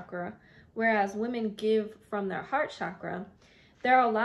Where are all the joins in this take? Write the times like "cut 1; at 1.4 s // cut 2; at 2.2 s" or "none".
none